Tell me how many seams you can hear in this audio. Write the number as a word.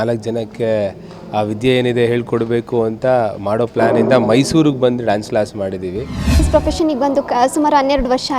one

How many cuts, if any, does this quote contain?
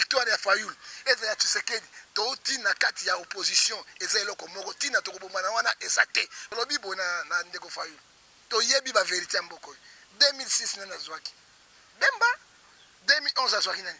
one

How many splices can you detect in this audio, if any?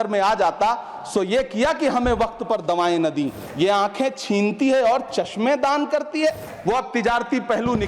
two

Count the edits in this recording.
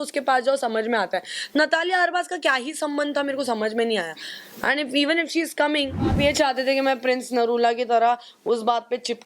one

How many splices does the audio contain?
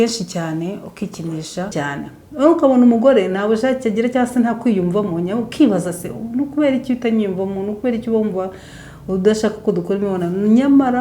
one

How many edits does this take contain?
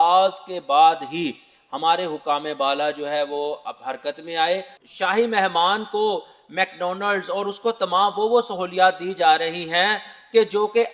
one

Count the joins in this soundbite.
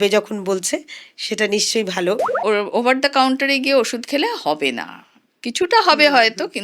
one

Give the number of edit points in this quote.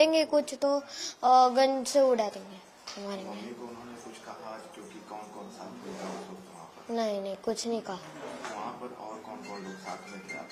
zero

